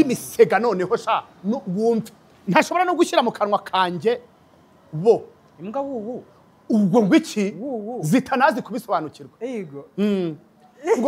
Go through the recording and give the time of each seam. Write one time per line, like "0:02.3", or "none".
none